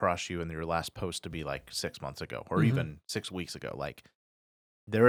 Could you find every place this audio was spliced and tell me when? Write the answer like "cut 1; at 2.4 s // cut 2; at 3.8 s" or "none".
none

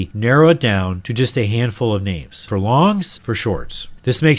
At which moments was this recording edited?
cut 1; at 1.0 s // cut 2; at 2.4 s // cut 3; at 3.1 s

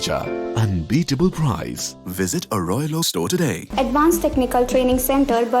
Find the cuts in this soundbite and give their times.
cut 1; at 3.6 s

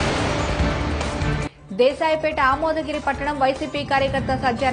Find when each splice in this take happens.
none

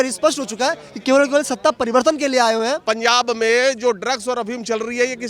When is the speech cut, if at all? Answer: cut 1; at 2.8 s

